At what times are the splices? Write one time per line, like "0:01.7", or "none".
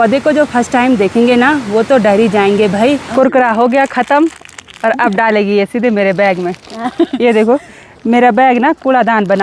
0:03.0